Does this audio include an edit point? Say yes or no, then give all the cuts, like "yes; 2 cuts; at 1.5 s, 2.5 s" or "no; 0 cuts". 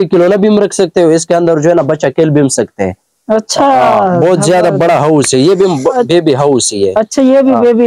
no; 0 cuts